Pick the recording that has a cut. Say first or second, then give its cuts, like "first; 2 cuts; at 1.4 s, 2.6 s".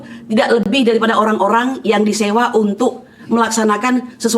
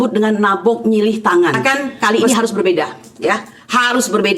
second; 1 cut; at 1.6 s